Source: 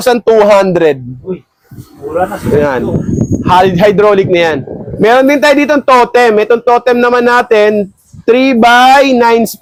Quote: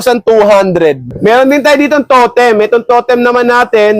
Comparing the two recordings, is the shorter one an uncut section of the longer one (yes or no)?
no